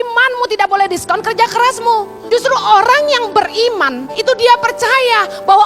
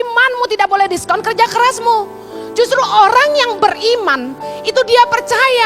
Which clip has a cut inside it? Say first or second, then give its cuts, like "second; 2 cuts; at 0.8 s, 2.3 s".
first; 2 cuts; at 2.1 s, 4.0 s